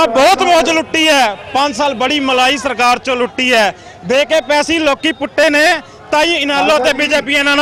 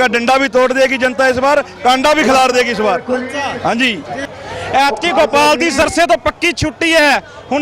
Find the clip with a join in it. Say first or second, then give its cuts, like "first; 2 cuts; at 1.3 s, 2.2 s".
second; 1 cut; at 4.2 s